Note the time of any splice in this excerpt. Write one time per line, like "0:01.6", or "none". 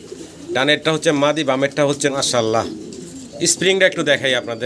0:02.1

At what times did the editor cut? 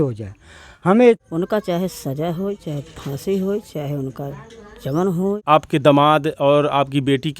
0:01.2
0:05.4

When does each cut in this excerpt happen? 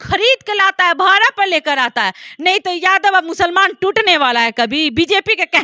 none

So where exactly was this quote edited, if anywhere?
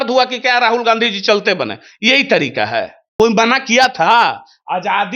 0:03.0

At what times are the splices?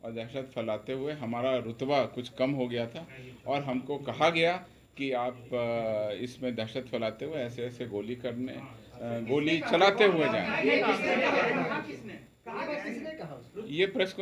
none

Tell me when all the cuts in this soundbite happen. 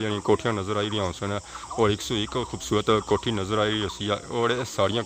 none

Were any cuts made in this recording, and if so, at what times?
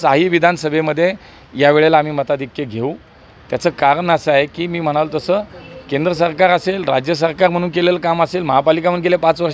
none

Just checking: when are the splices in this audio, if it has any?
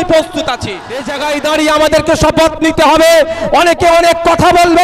0:01.1

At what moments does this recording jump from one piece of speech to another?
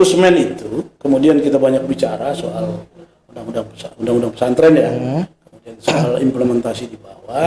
none

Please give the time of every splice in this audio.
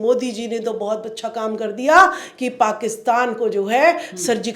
none

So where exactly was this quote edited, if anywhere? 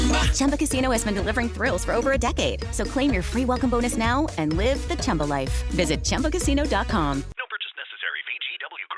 none

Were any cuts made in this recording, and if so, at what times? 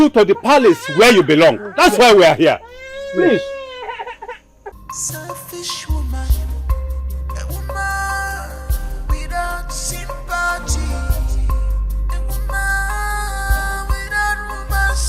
0:04.7

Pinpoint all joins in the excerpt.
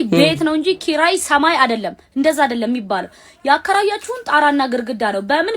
none

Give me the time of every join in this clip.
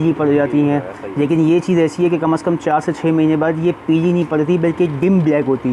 none

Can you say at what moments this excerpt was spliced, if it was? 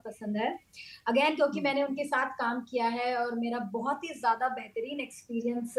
none

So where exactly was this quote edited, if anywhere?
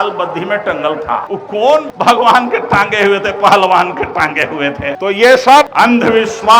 0:01.7
0:05.0
0:05.7

